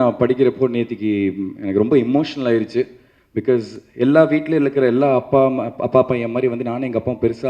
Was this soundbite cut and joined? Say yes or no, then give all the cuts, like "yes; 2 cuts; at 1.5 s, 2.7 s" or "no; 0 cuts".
no; 0 cuts